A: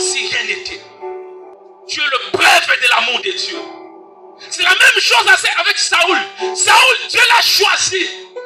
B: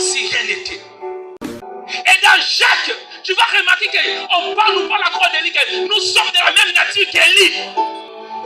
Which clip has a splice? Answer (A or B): B